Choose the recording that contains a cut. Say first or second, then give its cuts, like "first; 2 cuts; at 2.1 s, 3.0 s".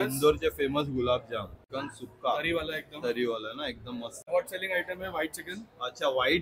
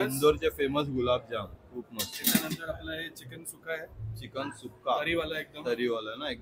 first; 2 cuts; at 1.6 s, 4.3 s